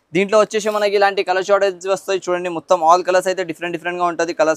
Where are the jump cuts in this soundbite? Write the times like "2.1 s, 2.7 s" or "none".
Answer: none

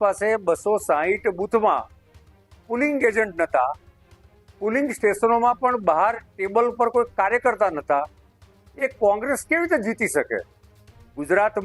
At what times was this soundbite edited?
none

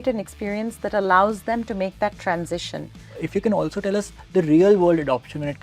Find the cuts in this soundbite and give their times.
3.2 s

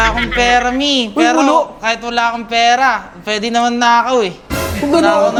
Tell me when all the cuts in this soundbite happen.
none

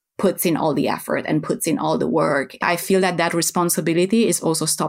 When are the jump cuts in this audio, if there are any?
2.6 s

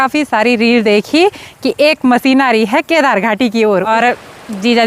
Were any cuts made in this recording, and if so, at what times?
3.9 s

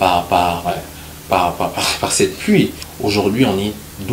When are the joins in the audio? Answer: 2.8 s

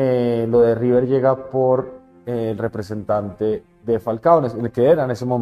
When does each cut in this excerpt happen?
none

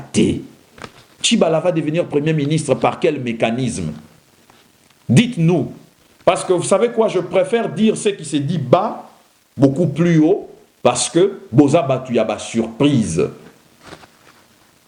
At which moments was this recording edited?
none

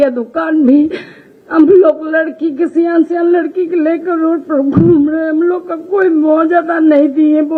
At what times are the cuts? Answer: none

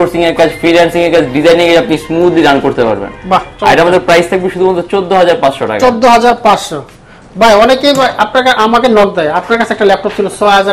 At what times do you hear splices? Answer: none

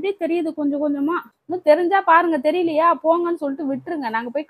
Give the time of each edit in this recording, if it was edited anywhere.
1.3 s

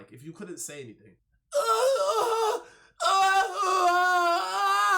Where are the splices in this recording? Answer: 1.5 s

